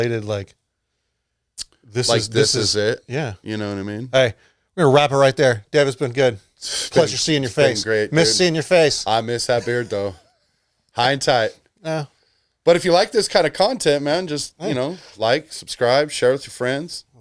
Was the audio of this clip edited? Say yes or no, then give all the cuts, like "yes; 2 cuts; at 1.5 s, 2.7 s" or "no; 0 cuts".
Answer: no; 0 cuts